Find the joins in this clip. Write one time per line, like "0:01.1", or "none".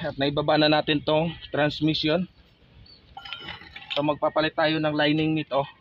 none